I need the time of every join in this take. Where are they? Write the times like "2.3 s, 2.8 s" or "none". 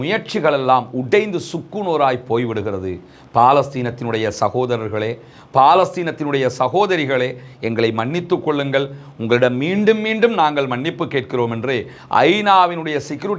none